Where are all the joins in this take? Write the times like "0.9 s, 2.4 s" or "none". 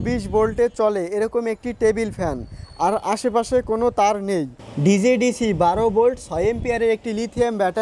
4.6 s